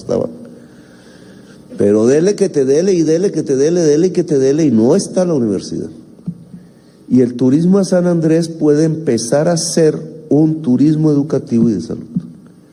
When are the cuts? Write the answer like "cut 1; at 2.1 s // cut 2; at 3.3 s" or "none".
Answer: none